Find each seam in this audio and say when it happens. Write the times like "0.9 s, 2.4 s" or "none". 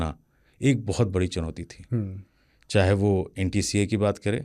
none